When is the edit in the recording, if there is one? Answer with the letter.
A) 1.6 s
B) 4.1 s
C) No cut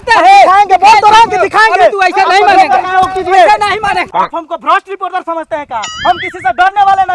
B